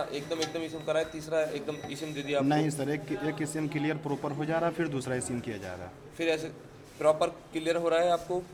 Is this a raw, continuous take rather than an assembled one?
yes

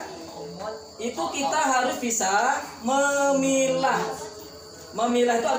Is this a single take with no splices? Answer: yes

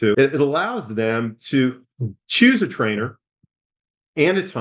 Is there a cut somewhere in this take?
no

